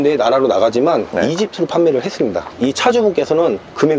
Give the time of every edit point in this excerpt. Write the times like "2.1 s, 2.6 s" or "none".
2.5 s